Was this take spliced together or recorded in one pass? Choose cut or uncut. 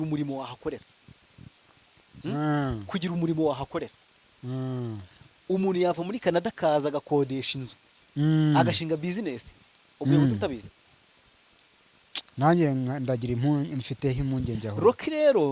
uncut